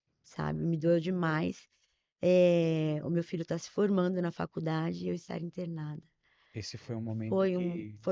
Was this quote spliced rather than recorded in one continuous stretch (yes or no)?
no